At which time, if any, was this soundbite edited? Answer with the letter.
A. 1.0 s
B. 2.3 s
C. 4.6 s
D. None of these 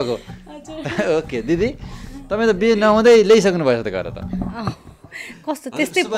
D